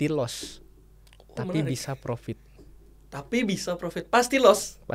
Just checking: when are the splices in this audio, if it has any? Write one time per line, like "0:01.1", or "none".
none